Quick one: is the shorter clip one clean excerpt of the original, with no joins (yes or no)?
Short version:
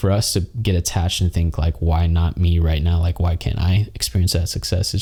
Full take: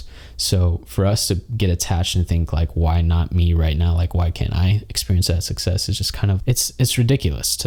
yes